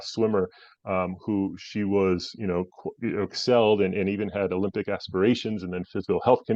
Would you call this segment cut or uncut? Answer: uncut